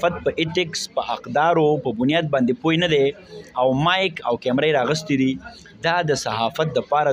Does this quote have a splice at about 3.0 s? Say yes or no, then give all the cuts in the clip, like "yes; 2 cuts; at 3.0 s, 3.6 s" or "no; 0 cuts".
no; 0 cuts